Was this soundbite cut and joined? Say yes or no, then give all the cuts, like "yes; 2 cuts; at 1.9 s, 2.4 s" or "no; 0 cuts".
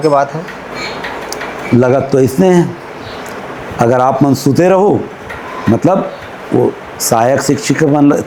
no; 0 cuts